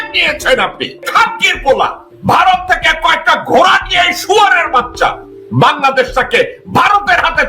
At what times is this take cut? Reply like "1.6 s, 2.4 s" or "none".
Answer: 1.1 s, 2.1 s